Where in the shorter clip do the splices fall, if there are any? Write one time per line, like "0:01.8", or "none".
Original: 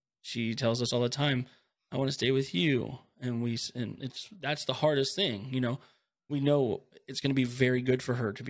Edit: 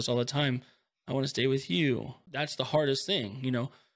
0:02.2